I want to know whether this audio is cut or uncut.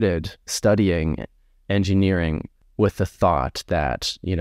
uncut